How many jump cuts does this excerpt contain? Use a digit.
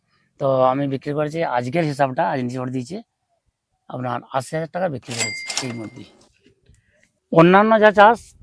1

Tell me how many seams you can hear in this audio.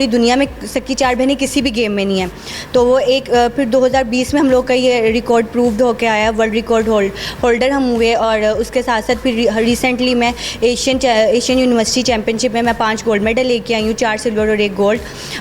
0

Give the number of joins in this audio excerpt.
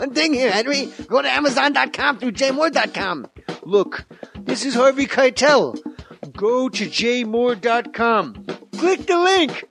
1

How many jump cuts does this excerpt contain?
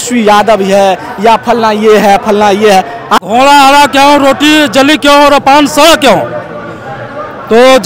1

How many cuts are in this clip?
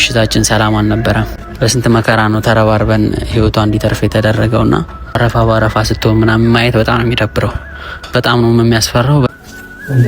3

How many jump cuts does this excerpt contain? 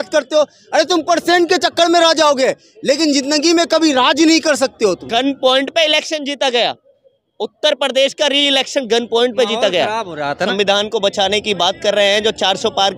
2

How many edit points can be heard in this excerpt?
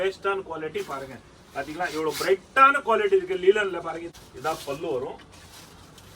1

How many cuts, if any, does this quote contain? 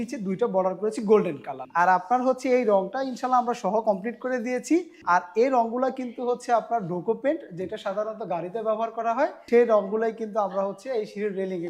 3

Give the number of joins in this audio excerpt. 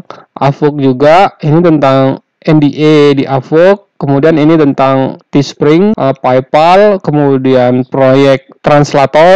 1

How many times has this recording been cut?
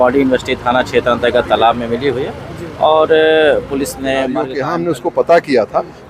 1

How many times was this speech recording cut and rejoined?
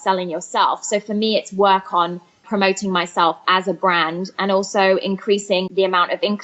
2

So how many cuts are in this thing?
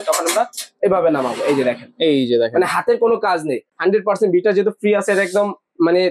1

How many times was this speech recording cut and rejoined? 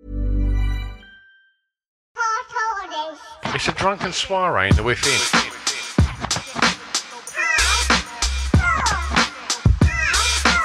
1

